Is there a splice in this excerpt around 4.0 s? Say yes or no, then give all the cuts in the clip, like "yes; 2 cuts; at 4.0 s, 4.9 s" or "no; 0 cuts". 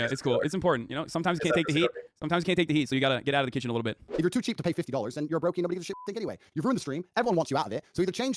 yes; 1 cut; at 4.0 s